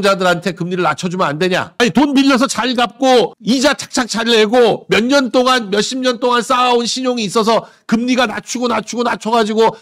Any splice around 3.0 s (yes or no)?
no